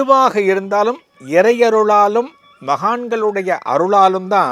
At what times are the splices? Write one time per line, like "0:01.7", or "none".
none